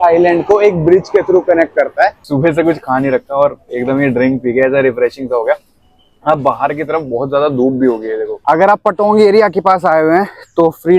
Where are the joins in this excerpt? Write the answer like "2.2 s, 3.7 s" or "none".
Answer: 2.2 s, 8.3 s